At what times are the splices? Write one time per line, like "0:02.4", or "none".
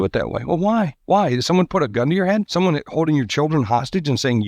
0:01.0
0:02.5